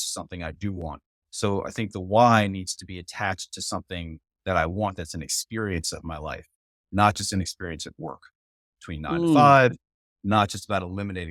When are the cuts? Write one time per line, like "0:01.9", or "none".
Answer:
none